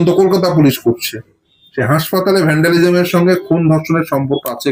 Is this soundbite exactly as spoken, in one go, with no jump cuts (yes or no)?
yes